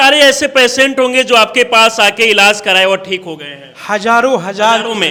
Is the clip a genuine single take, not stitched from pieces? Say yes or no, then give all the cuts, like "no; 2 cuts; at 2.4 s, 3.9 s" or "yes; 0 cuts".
yes; 0 cuts